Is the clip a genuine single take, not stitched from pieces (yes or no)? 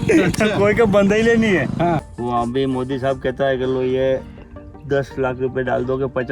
no